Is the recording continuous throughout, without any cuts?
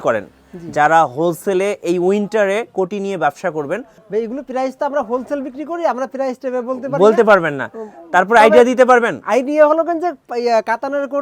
no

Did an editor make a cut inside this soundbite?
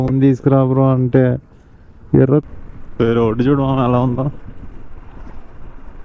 yes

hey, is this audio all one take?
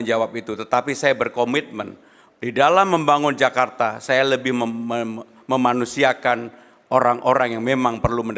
yes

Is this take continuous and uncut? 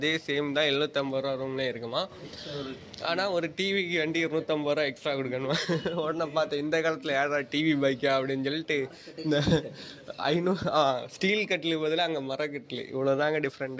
yes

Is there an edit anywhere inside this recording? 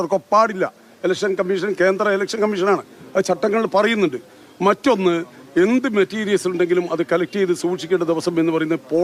no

